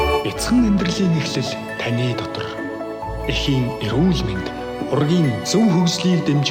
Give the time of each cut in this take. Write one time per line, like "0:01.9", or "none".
none